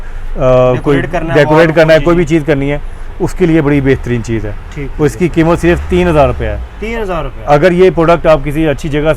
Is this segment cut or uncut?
uncut